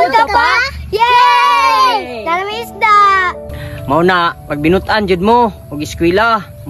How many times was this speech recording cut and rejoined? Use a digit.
1